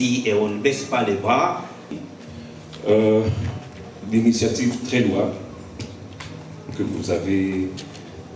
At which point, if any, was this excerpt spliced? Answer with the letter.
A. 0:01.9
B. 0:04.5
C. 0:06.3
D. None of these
A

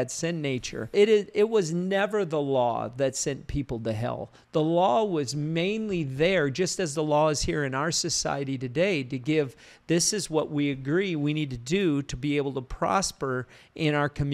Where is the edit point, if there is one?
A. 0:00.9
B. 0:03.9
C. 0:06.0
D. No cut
A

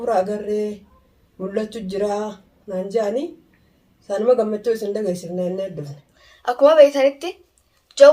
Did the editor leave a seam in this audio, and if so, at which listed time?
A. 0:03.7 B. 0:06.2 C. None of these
B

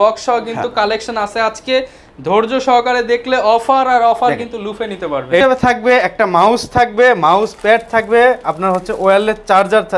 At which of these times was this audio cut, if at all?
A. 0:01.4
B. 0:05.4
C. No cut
B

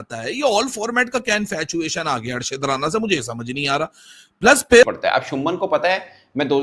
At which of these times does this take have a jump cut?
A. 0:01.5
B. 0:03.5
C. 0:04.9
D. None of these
C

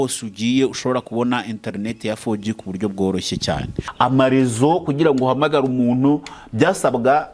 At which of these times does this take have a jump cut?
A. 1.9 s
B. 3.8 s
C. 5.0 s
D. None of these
B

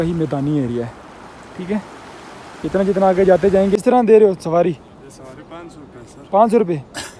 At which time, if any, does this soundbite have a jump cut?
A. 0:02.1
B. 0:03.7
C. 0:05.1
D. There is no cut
B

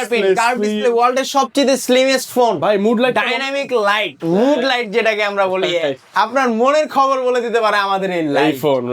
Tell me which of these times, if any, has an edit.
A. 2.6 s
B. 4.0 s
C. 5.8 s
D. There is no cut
D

